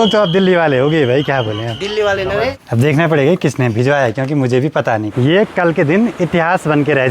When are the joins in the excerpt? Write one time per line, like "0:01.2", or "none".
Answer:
0:02.5
0:05.1